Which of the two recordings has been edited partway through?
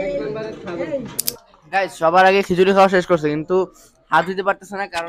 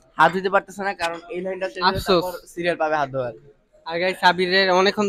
first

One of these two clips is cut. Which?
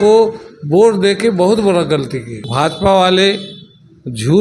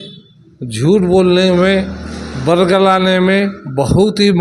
first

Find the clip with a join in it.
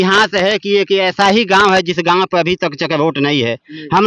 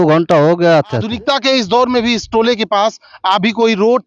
second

